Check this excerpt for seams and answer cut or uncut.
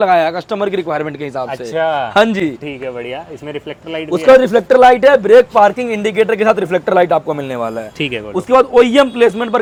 uncut